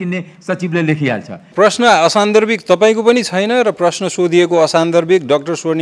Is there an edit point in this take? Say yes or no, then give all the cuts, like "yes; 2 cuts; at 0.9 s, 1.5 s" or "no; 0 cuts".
yes; 1 cut; at 1.5 s